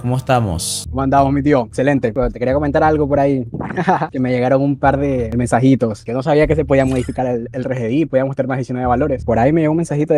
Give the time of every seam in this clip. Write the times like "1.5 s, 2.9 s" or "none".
none